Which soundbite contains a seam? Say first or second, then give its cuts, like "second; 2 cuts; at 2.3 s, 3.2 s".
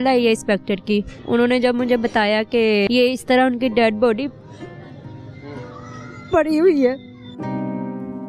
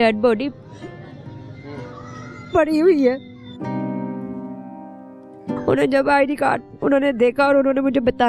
first; 2 cuts; at 1.1 s, 2.9 s